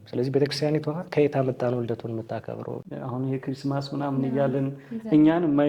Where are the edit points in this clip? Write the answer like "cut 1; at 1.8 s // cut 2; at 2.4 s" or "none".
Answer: cut 1; at 2.8 s